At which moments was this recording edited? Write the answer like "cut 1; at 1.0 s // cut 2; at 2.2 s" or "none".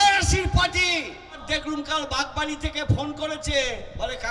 cut 1; at 1.4 s

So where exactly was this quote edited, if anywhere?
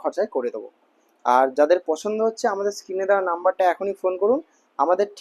none

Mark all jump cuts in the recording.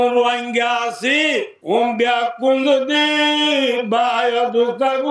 cut 1; at 1.5 s

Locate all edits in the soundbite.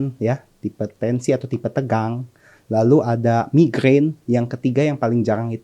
none

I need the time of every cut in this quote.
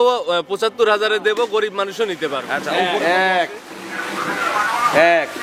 cut 1; at 2.6 s

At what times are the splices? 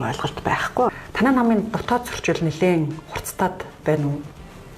cut 1; at 0.9 s

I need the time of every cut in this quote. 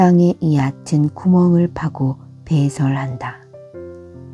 cut 1; at 3.4 s

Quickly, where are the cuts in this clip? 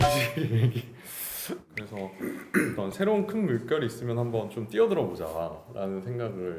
cut 1; at 1.7 s

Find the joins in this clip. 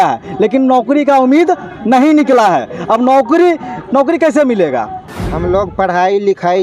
cut 1; at 5.0 s

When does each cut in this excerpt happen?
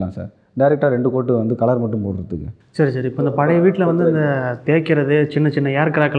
cut 1; at 2.6 s

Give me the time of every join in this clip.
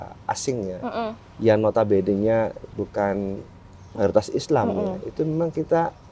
none

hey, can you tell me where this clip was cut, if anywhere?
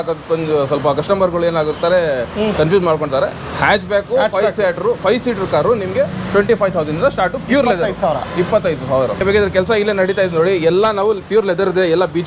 cut 1; at 9.2 s

